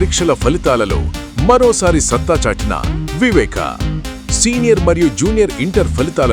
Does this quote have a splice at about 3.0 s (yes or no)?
no